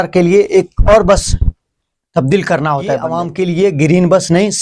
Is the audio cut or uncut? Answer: cut